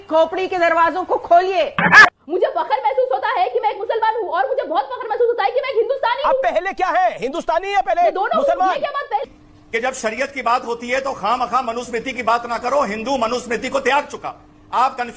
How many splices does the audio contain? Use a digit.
2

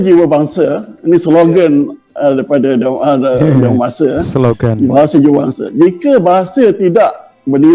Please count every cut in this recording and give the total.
0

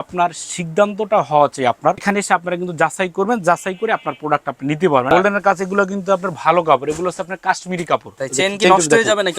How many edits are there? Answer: 3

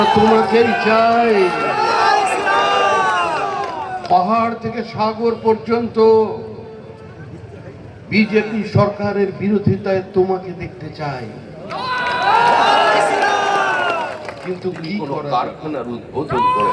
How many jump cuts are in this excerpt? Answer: 1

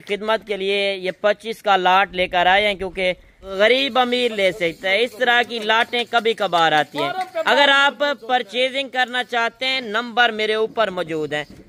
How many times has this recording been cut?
1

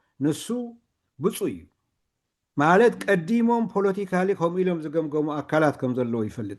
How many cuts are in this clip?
0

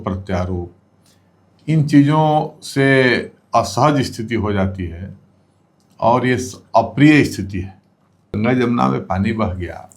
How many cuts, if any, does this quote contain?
1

